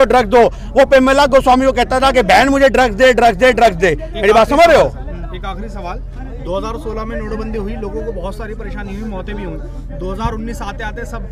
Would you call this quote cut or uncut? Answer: uncut